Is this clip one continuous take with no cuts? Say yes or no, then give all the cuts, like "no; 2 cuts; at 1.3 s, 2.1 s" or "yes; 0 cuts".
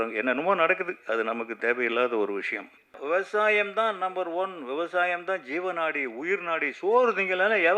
no; 1 cut; at 3.0 s